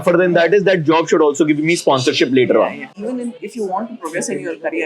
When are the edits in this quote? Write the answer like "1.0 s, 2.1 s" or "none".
2.9 s